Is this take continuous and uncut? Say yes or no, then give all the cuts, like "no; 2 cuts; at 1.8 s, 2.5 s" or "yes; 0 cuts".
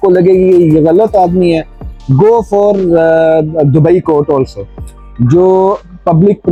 yes; 0 cuts